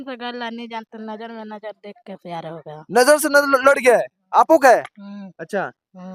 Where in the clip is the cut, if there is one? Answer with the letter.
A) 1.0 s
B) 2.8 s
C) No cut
C